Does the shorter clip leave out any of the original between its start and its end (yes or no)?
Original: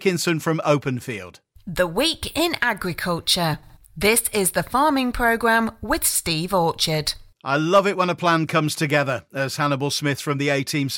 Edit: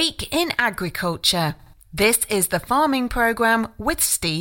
no